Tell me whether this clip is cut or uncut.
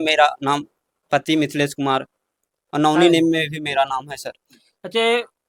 uncut